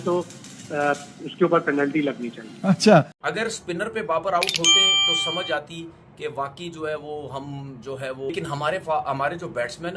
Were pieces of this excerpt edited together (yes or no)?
yes